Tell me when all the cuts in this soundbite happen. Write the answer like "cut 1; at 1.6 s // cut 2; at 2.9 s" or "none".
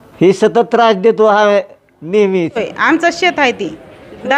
cut 1; at 2.6 s